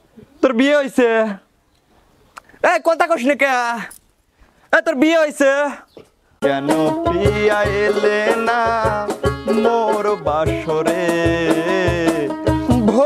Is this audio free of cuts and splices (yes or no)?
no